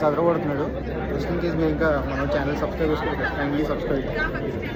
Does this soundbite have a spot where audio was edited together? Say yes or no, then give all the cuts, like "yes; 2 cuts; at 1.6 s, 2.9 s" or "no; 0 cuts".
no; 0 cuts